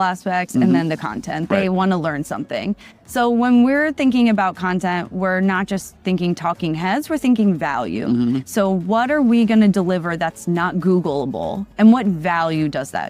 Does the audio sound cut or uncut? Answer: cut